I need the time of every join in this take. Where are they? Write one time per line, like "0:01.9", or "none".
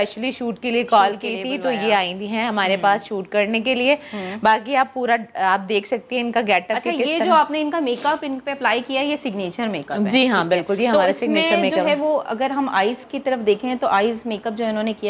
none